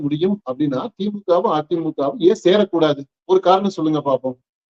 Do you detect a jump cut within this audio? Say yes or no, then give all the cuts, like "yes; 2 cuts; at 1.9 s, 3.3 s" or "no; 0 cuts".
no; 0 cuts